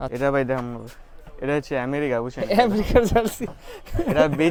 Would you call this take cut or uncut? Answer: uncut